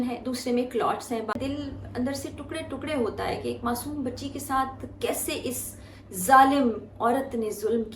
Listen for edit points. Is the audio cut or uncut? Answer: cut